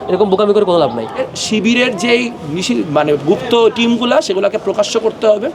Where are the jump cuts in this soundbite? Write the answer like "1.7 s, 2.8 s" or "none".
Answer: 1.3 s